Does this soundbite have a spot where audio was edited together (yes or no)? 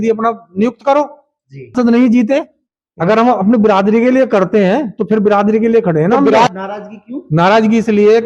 yes